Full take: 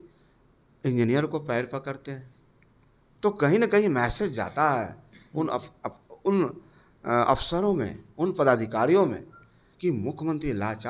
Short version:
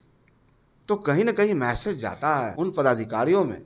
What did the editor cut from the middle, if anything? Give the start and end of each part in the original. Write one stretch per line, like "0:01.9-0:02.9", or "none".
0:04.8-0:08.1